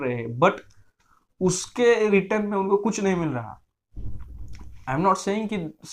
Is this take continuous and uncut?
yes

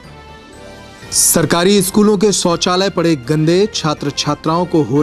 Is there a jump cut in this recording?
yes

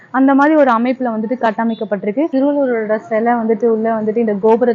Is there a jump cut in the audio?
yes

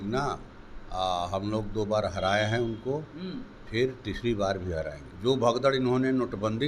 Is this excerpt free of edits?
no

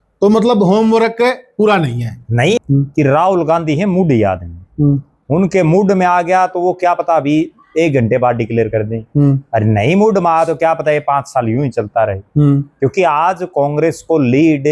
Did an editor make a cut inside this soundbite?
yes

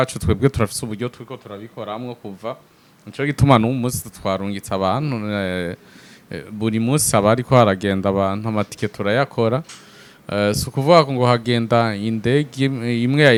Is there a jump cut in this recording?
no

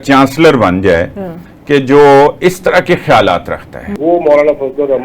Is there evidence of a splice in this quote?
yes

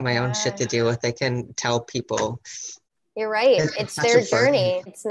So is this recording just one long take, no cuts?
yes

